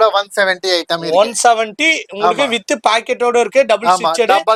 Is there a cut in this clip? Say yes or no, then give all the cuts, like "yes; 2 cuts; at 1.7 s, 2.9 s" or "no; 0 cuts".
no; 0 cuts